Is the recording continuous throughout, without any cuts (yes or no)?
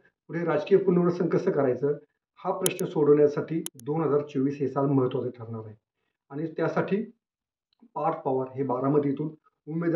yes